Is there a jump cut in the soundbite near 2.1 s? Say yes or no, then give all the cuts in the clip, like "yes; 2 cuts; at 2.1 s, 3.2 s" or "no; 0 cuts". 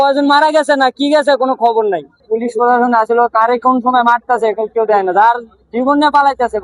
yes; 1 cut; at 2.1 s